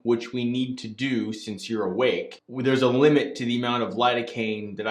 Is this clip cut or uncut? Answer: cut